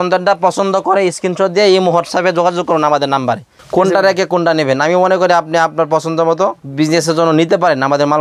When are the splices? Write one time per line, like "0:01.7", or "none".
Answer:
0:03.5
0:06.6